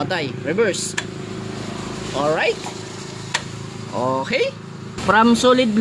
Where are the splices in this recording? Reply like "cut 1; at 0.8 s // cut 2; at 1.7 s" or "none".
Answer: cut 1; at 4.9 s